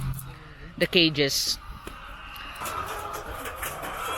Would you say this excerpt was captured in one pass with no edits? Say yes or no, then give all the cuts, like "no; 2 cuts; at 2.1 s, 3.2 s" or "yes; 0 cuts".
no; 1 cut; at 2.6 s